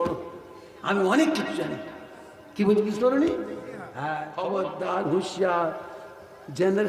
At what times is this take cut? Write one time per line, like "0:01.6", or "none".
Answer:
0:04.3